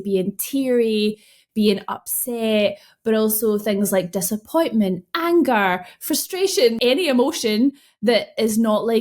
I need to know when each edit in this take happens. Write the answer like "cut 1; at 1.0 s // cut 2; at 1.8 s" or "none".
cut 1; at 6.8 s